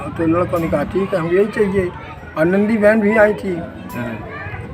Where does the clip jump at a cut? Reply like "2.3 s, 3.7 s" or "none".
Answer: none